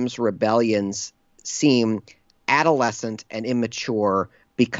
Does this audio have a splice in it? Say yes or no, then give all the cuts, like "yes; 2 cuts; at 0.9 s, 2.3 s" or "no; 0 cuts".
no; 0 cuts